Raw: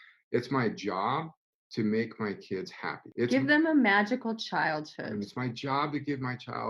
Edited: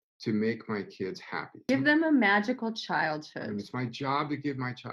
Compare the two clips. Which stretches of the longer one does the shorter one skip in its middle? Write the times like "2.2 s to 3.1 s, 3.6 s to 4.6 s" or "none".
3.2 s to 3.3 s